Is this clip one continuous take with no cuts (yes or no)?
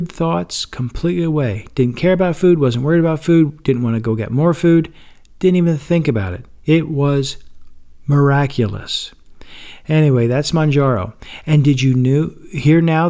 yes